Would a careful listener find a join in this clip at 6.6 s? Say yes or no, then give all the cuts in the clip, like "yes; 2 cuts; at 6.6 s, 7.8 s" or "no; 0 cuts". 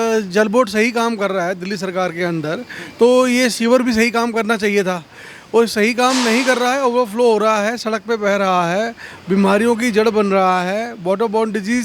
no; 0 cuts